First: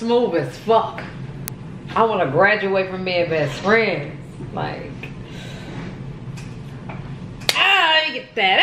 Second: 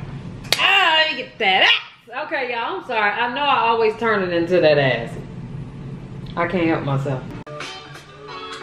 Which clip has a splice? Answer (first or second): second